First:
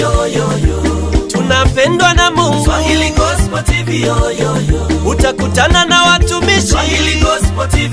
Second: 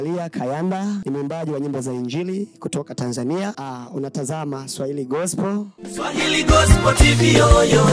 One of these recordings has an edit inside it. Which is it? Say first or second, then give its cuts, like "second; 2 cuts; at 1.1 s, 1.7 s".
second; 3 cuts; at 1.0 s, 3.6 s, 5.7 s